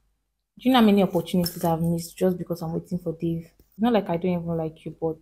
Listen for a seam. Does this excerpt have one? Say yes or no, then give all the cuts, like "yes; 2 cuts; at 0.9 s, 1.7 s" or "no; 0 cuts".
yes; 1 cut; at 3.6 s